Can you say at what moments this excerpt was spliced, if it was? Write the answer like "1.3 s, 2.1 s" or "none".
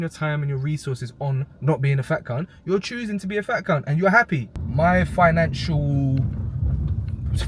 4.6 s